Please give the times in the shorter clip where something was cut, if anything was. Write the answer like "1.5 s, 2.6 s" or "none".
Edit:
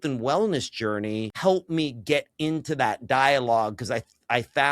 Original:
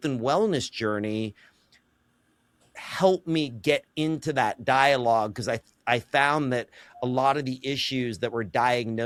1.3 s